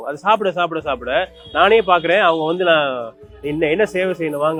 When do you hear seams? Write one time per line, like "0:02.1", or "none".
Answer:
none